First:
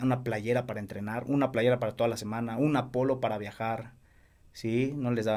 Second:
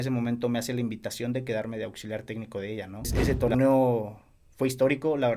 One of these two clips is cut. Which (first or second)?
second